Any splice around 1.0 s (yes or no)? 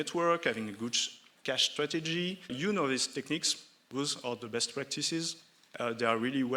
no